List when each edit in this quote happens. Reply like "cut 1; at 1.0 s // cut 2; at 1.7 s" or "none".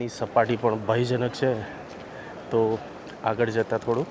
none